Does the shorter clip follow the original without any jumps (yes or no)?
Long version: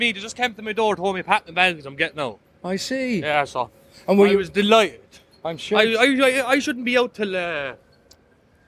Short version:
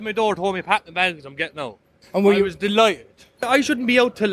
no